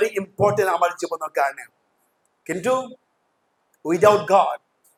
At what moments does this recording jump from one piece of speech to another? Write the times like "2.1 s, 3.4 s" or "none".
none